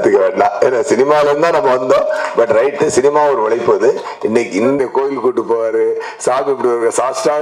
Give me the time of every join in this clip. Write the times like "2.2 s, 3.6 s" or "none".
4.8 s